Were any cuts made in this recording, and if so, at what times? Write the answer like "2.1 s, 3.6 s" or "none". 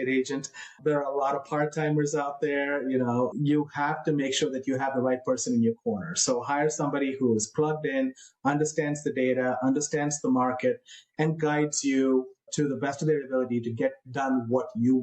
3.3 s